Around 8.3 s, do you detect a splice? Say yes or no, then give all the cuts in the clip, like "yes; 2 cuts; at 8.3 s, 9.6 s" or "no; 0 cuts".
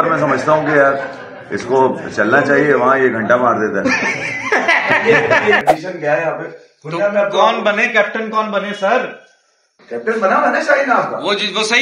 no; 1 cut; at 5.6 s